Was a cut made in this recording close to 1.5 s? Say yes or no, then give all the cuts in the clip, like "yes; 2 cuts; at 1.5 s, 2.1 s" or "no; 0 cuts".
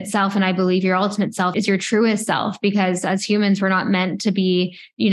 yes; 1 cut; at 1.5 s